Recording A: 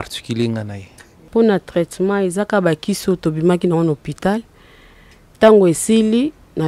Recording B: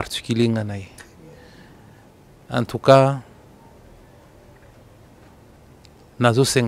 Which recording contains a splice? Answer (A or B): A